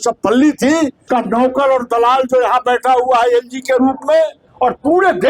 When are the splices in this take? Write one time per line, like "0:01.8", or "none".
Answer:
0:01.0
0:04.4